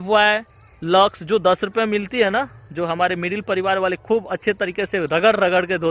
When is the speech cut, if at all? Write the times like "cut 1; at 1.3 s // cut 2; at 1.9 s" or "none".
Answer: none